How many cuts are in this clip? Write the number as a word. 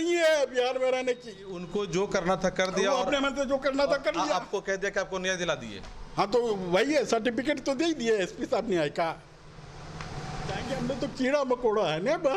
two